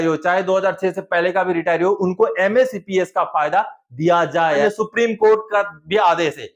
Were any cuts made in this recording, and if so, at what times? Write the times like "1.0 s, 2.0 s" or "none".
4.6 s